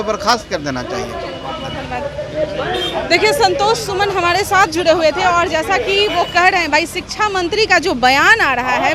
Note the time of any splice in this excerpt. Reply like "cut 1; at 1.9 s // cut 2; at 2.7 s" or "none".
none